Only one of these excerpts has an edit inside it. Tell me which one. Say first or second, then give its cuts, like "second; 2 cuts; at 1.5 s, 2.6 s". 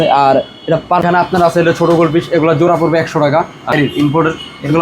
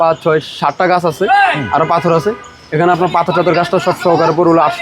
first; 2 cuts; at 1.0 s, 3.7 s